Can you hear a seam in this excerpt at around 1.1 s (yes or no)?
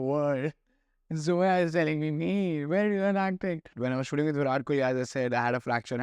no